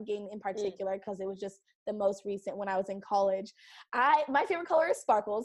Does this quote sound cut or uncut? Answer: uncut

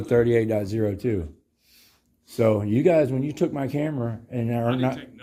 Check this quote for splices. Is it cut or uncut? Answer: uncut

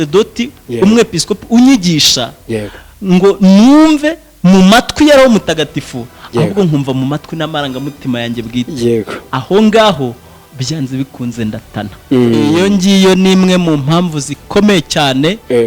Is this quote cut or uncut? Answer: cut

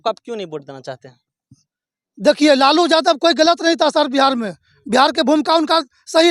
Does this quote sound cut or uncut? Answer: uncut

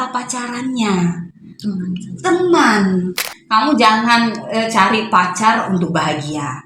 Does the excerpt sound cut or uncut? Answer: cut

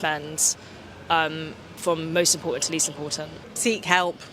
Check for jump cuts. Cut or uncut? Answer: cut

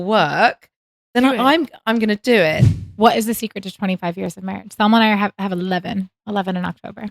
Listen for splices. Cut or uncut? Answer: cut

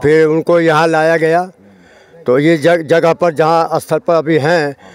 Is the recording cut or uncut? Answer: uncut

